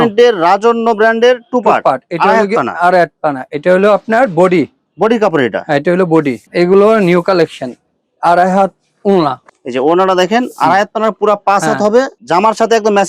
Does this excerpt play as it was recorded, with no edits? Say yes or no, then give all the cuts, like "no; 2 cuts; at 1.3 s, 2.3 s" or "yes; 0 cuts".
yes; 0 cuts